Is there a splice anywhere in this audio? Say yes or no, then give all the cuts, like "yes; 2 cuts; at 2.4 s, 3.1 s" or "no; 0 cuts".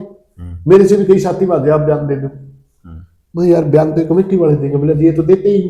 no; 0 cuts